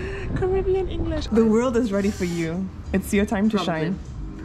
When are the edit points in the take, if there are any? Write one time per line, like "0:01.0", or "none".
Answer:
0:01.2